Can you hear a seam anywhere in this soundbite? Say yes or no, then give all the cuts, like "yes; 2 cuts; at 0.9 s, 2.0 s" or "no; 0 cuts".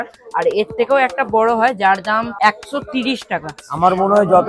yes; 2 cuts; at 2.3 s, 3.5 s